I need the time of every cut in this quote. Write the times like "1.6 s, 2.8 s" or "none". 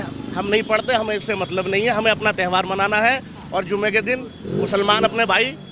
none